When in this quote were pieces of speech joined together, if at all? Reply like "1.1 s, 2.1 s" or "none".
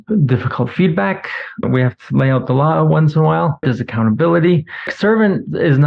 1.6 s, 3.6 s, 4.9 s